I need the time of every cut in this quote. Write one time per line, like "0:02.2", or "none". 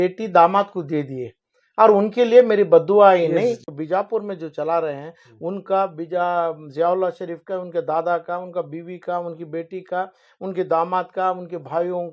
0:03.6